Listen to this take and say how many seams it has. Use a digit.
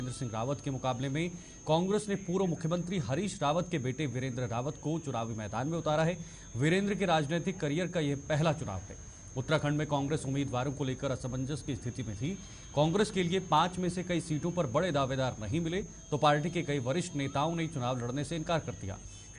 1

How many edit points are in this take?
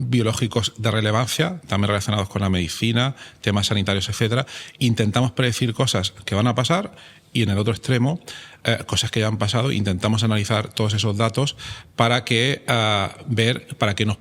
0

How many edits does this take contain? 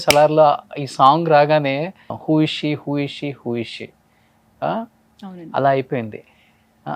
0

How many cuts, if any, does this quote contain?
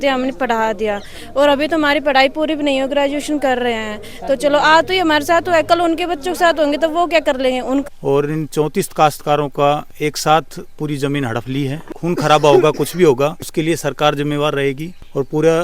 2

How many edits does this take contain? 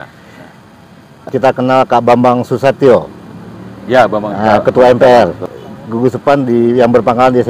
2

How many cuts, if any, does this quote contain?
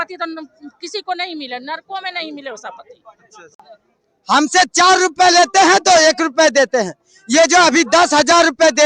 1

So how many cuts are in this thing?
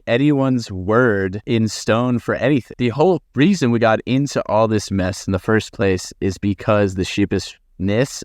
2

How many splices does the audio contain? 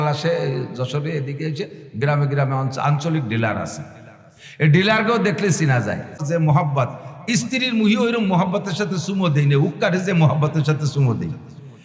1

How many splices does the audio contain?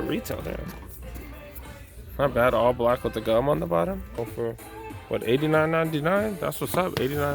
1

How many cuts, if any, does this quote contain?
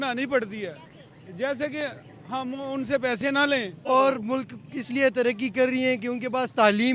1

